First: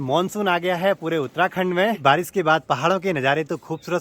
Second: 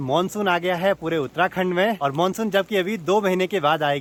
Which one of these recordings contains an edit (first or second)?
first